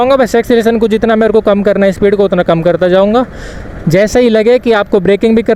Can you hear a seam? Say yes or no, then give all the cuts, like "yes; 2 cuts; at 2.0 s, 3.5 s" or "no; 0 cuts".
no; 0 cuts